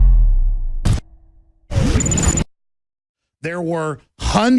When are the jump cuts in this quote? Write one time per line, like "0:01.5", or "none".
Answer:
none